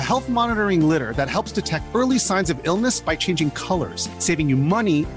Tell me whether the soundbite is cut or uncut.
uncut